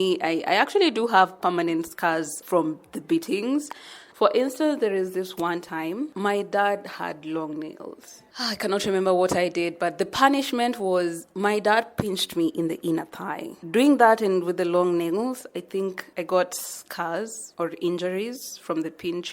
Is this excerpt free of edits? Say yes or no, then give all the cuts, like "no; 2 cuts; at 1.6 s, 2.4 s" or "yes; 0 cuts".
no; 4 cuts; at 2.4 s, 4.0 s, 6.1 s, 13.6 s